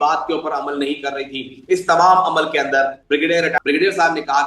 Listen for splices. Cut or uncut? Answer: cut